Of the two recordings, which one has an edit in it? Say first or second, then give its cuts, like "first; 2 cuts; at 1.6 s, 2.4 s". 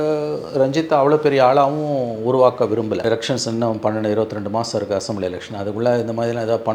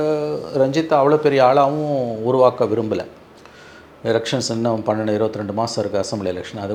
first; 1 cut; at 3.0 s